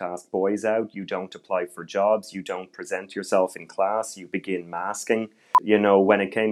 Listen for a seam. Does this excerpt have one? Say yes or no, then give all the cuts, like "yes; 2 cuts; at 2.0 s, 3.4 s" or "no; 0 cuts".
yes; 1 cut; at 5.5 s